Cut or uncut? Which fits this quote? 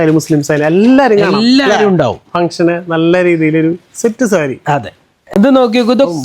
uncut